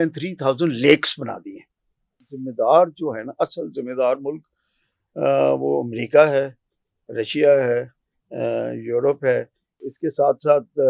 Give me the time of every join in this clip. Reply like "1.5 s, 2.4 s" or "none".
2.2 s, 9.9 s